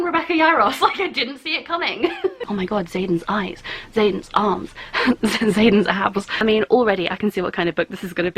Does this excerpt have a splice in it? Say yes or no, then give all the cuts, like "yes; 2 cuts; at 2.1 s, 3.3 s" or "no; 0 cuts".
yes; 2 cuts; at 2.4 s, 6.3 s